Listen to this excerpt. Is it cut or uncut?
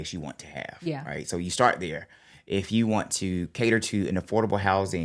uncut